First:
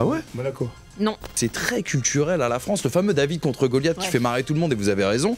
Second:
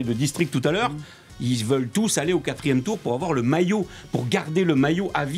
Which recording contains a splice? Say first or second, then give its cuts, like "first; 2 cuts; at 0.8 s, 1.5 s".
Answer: first; 1 cut; at 1.3 s